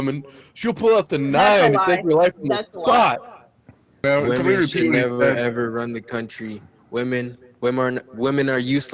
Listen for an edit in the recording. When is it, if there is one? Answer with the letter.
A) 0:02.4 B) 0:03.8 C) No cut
B